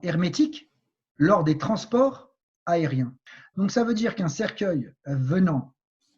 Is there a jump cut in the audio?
yes; 1 cut; at 3.2 s

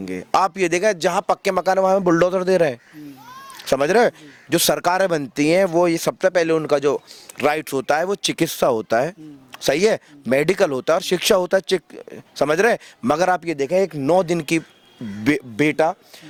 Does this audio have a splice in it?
no; 0 cuts

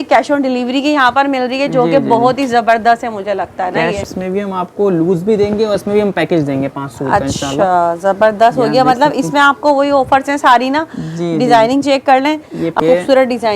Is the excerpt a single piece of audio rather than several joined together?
no; 2 cuts; at 4.0 s, 12.8 s

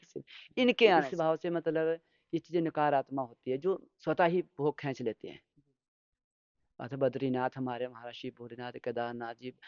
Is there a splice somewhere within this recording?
yes; 1 cut; at 1.1 s

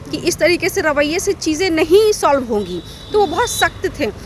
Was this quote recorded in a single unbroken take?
yes; 0 cuts

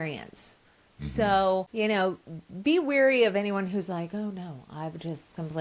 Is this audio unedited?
no; 1 cut; at 1.7 s

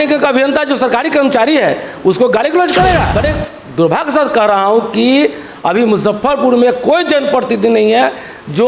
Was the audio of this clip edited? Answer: yes; 1 cut; at 3.1 s

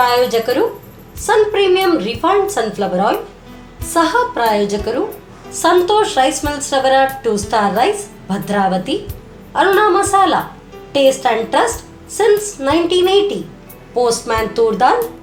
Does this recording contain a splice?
no; 0 cuts

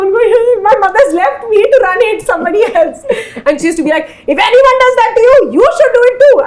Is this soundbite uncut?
yes; 0 cuts

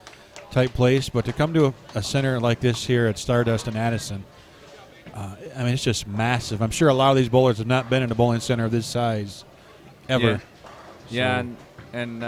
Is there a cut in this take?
no; 0 cuts

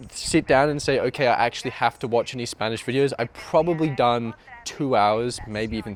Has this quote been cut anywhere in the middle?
no; 0 cuts

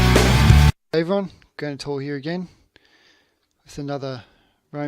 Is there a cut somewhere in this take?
yes; 1 cut; at 2.0 s

